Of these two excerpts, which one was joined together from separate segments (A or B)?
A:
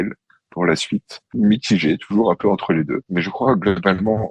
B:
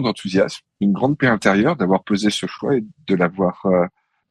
A